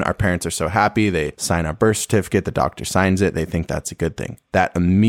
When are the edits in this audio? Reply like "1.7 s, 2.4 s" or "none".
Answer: 1.4 s